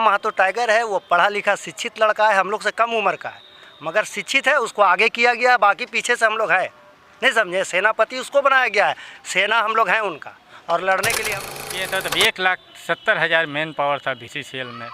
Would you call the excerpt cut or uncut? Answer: cut